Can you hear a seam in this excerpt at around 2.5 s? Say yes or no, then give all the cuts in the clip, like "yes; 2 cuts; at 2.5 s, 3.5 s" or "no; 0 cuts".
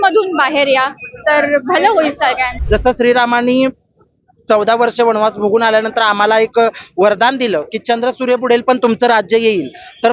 yes; 1 cut; at 2.5 s